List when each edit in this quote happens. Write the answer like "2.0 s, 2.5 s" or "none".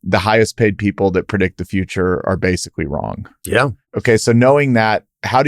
3.9 s

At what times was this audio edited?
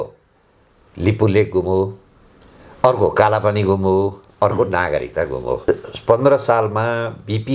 5.6 s

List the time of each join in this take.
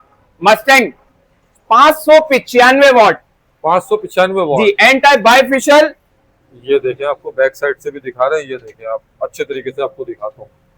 6.1 s

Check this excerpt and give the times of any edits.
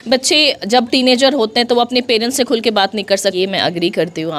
3.3 s

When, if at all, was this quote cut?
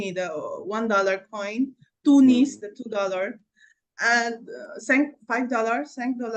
none

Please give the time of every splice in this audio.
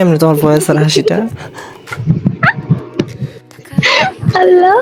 1.7 s

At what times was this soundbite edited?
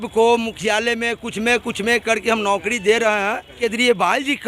3.6 s

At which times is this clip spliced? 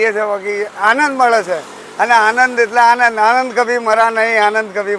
none

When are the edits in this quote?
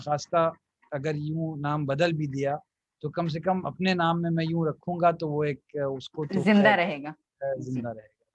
none

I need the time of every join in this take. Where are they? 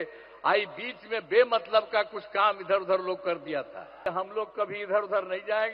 4.1 s

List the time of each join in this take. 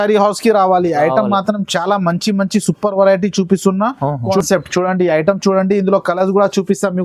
4.4 s

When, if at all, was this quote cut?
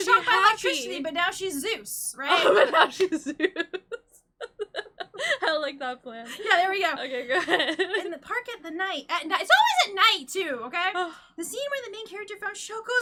none

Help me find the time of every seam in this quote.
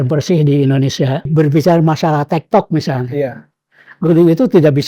1.3 s

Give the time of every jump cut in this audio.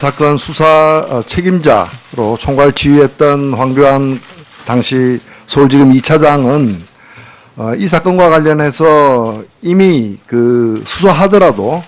1.3 s

